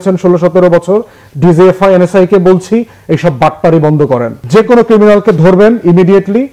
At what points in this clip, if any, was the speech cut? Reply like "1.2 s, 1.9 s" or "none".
4.4 s